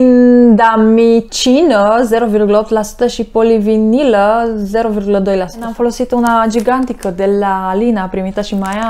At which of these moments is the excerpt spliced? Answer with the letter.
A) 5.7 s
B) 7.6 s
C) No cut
A